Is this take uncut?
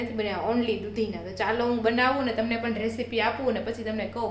yes; 0 cuts

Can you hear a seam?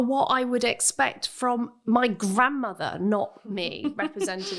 no; 0 cuts

